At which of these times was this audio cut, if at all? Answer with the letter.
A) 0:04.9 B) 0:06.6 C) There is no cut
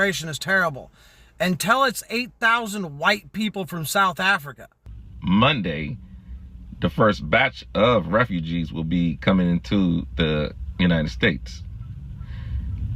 A